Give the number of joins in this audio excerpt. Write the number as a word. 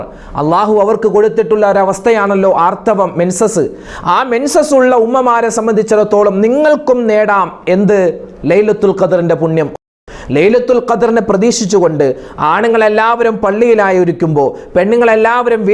one